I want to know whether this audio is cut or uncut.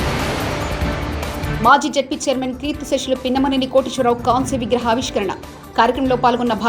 cut